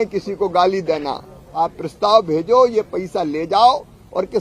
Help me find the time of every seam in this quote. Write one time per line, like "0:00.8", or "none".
0:01.4